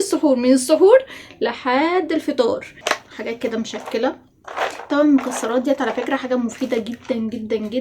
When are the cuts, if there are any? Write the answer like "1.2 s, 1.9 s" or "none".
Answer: 2.7 s